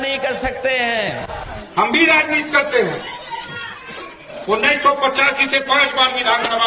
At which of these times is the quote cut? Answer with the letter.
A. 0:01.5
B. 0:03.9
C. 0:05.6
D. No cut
A